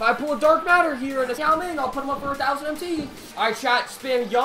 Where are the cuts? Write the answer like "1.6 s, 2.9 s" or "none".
3.3 s